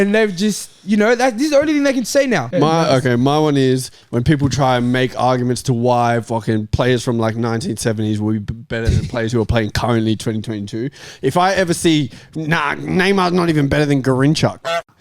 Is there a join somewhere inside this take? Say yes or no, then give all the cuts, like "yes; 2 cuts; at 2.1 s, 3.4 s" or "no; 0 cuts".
yes; 1 cut; at 2.5 s